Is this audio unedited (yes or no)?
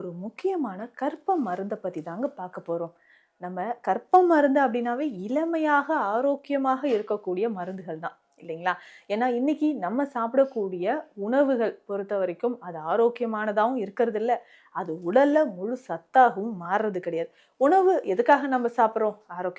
yes